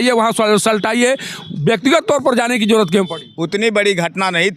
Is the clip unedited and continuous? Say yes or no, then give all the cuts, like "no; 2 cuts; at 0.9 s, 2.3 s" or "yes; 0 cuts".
yes; 0 cuts